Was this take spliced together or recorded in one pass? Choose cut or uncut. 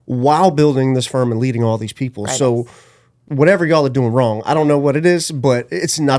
cut